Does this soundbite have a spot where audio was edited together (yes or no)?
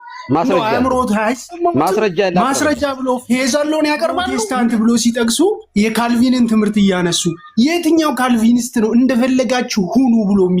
yes